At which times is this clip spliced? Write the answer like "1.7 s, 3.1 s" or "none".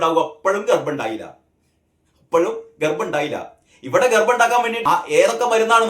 4.7 s

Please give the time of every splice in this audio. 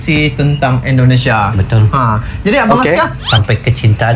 3.2 s

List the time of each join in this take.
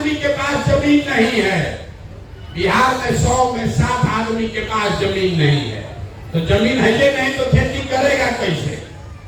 none

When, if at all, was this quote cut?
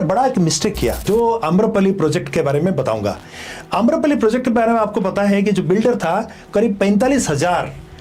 1.0 s

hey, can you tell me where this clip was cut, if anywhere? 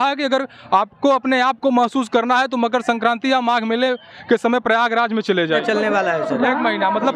5.6 s

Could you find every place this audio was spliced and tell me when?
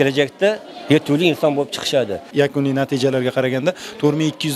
2.3 s

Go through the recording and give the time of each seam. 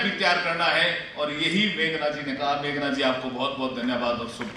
none

